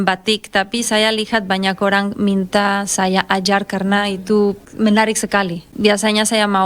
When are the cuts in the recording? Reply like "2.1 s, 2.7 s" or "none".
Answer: 4.6 s, 5.7 s